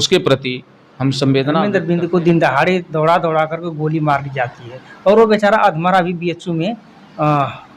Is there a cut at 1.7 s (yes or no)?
yes